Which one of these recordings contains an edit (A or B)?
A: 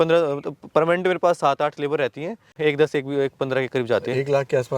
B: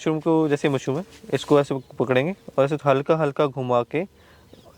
A